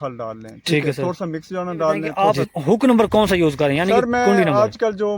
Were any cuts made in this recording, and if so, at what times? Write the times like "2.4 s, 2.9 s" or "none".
2.1 s